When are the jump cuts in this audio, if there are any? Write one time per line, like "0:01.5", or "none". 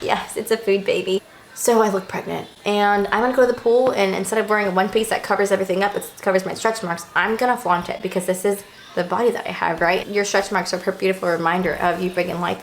0:01.2
0:10.0